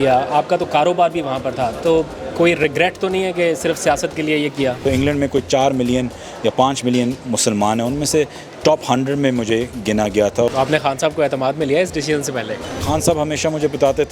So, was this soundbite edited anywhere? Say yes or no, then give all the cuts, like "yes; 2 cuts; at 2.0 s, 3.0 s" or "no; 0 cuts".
yes; 3 cuts; at 4.8 s, 10.5 s, 12.8 s